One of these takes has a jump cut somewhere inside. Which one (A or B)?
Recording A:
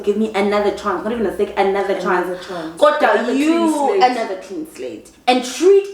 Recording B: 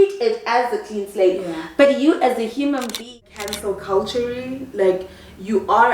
B